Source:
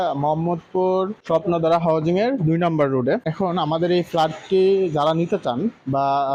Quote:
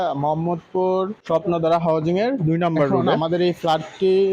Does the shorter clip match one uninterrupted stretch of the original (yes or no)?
no